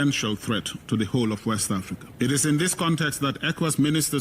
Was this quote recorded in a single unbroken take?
no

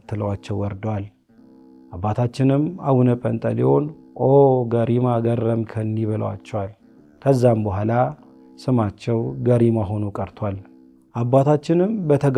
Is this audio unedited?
yes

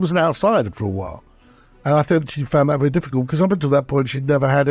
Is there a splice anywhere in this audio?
no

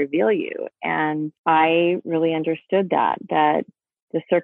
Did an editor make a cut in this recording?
yes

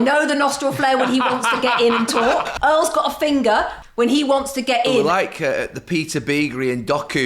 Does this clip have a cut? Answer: yes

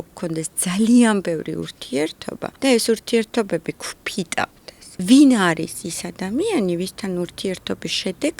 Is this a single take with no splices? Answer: no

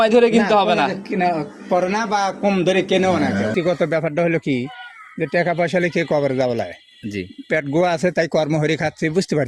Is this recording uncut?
no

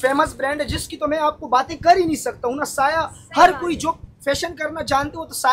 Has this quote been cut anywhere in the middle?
no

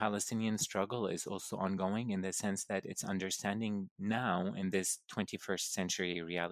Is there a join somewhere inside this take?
no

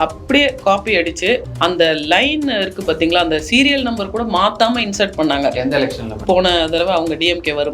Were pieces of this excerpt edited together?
yes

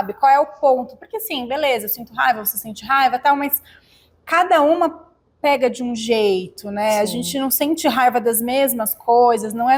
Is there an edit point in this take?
no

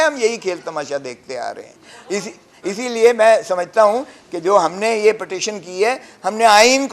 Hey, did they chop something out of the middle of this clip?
no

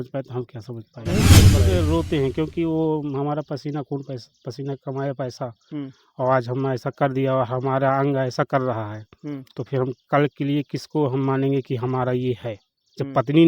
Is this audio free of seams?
no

